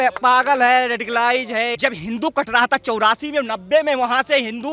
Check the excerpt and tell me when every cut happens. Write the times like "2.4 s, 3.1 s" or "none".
1.7 s